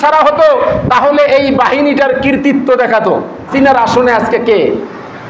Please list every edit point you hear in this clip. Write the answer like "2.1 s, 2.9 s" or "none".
3.5 s